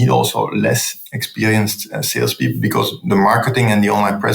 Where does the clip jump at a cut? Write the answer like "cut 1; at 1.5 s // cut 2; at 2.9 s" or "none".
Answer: cut 1; at 0.9 s